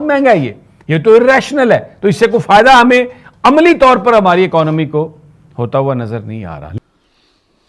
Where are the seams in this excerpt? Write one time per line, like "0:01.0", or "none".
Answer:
0:06.7